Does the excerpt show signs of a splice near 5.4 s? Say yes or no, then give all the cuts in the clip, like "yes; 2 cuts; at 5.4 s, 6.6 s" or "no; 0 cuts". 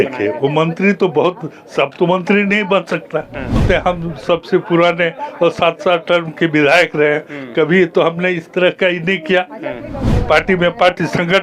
no; 1 cut; at 3.6 s